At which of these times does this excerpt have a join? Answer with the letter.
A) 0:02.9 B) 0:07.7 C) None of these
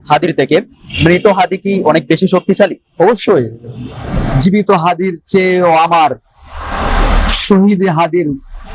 C